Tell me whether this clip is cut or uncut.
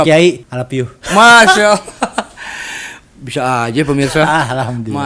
uncut